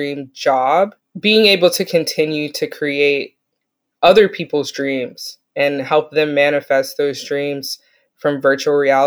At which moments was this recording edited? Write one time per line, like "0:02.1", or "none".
0:01.0